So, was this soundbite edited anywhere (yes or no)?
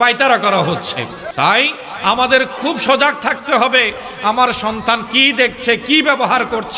yes